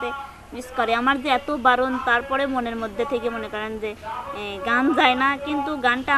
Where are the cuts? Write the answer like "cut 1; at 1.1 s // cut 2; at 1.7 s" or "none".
none

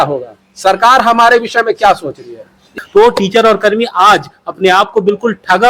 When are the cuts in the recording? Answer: cut 1; at 2.6 s

